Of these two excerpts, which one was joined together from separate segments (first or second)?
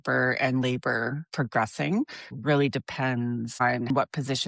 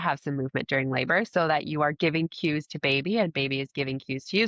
first